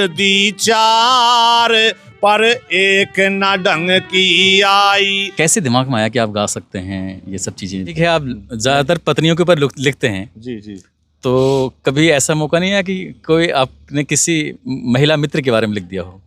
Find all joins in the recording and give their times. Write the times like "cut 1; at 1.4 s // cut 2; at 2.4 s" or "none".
cut 1; at 5.2 s // cut 2; at 7.9 s